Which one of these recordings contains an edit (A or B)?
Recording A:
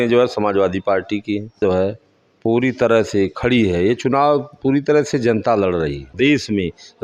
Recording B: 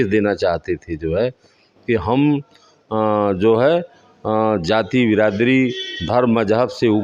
A